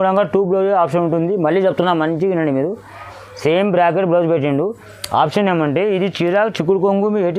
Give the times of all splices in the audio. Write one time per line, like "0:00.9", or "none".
none